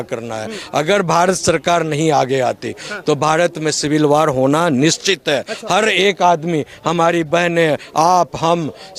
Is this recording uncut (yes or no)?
yes